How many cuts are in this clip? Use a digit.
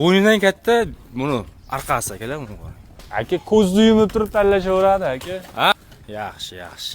1